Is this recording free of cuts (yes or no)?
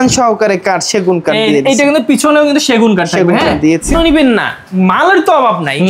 no